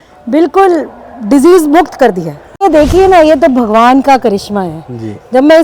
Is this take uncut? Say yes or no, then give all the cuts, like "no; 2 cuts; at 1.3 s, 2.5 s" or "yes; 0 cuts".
no; 1 cut; at 2.6 s